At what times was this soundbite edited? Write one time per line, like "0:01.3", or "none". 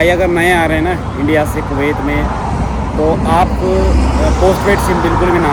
none